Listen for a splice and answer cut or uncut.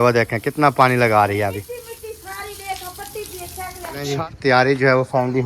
cut